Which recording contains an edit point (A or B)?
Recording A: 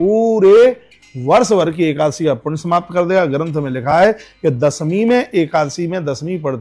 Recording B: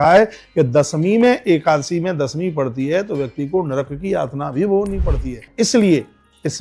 B